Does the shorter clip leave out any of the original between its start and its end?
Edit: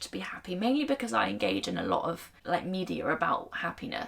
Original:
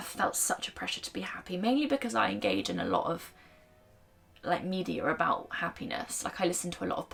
yes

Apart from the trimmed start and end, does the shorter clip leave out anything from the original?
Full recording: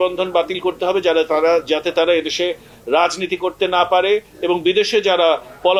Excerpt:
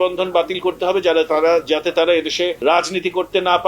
yes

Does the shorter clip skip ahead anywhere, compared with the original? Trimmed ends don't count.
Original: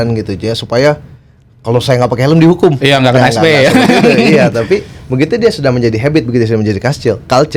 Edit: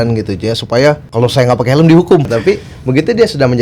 yes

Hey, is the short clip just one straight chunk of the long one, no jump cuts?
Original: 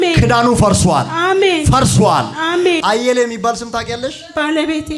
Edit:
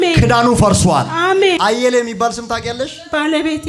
no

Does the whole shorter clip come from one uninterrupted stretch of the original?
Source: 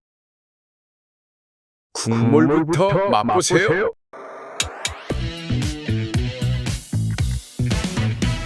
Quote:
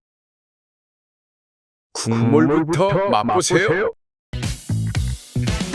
no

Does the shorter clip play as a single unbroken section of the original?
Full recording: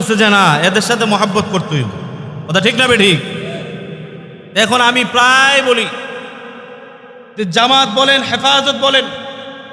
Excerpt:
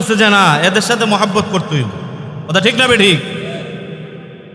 yes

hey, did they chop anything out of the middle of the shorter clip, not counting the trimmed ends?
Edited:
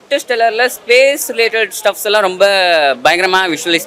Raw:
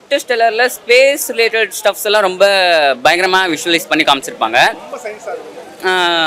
no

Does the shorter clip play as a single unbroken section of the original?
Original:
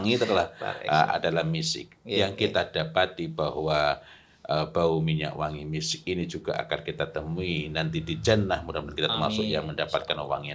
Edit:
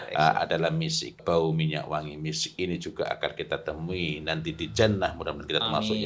no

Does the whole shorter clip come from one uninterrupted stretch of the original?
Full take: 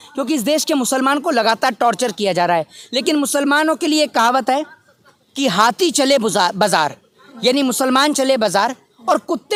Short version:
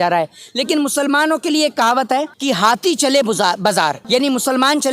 no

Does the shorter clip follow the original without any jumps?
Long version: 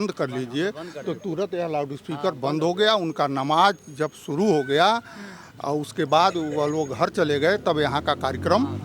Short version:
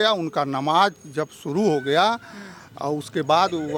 yes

